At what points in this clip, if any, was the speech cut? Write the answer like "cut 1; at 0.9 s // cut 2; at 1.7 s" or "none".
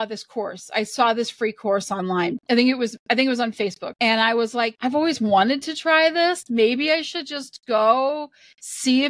cut 1; at 2.4 s // cut 2; at 3.9 s // cut 3; at 4.8 s